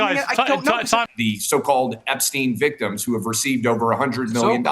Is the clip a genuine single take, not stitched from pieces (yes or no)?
no